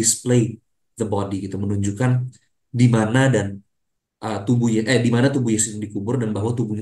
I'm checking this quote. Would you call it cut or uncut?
uncut